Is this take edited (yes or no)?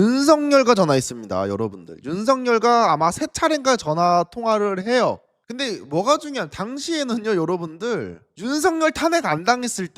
yes